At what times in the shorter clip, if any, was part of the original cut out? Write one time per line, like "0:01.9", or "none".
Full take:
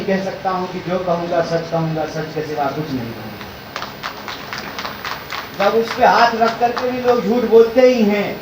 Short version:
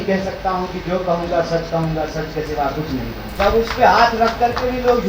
0:03.2